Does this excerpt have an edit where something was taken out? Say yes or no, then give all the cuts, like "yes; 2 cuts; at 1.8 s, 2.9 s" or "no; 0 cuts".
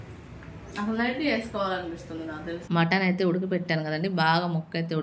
yes; 1 cut; at 2.6 s